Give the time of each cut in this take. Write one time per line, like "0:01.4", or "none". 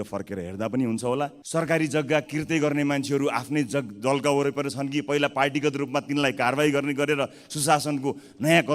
0:01.4